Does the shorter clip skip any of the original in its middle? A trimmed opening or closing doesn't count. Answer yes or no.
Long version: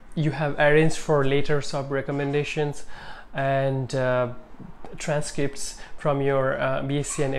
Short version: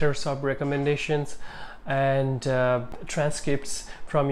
yes